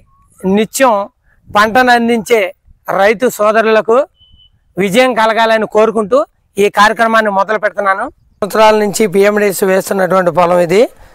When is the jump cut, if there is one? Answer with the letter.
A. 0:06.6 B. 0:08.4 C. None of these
B